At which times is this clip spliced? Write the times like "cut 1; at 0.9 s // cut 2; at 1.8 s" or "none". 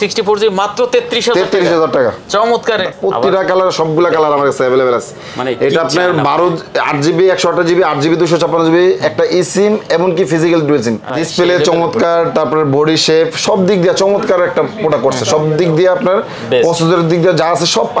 cut 1; at 2.9 s // cut 2; at 11.1 s